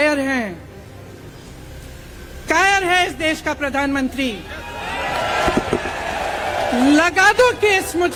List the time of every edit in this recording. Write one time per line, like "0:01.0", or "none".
none